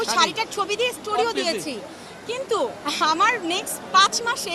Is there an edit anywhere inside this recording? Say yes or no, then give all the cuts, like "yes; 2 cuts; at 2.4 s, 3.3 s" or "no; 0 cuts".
no; 0 cuts